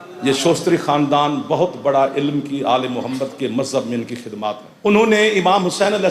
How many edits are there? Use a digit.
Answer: 1